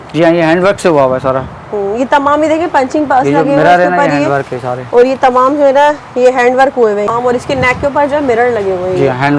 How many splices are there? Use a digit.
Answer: 1